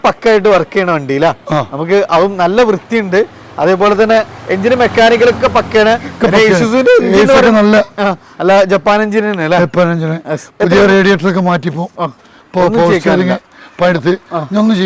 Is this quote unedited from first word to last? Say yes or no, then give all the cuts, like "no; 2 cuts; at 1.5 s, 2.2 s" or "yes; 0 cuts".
yes; 0 cuts